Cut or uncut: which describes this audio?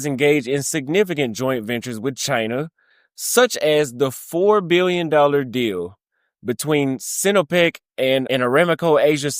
uncut